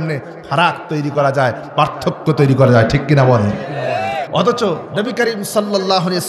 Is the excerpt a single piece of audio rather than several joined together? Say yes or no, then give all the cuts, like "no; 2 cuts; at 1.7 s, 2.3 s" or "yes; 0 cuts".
no; 1 cut; at 4.2 s